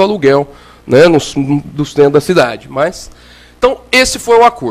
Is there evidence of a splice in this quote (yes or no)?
no